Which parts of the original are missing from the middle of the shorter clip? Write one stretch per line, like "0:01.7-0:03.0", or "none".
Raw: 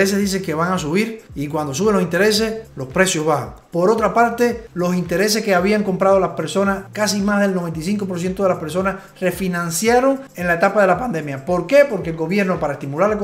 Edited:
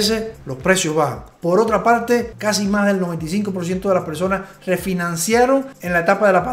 0:04.6-0:06.9